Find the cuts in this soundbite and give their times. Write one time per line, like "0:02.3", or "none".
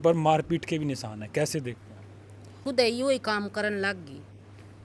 0:02.8